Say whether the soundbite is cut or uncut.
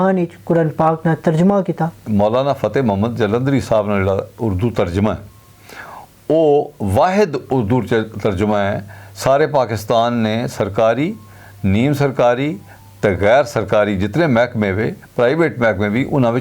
cut